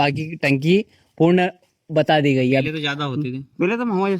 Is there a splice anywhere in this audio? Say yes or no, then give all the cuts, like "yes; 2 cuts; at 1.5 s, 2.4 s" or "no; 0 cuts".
yes; 1 cut; at 2.6 s